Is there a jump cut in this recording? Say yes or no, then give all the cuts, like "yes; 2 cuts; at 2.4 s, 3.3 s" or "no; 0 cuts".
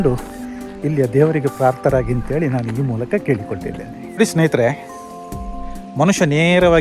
yes; 1 cut; at 4.0 s